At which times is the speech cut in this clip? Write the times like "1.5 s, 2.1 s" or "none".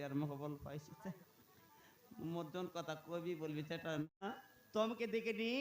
4.3 s